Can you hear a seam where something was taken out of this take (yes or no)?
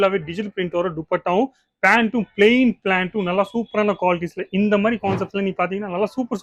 no